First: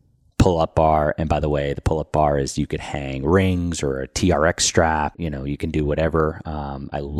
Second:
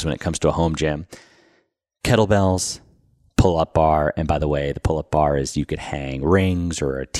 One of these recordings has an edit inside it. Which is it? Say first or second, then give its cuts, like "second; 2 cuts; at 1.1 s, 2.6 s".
first; 1 cut; at 5.1 s